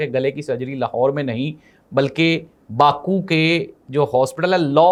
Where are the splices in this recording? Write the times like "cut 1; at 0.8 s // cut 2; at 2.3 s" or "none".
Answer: none